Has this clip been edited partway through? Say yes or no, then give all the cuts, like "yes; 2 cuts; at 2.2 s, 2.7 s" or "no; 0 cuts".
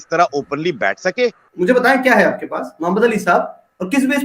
yes; 1 cut; at 1.5 s